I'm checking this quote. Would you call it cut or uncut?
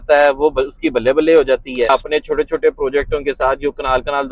cut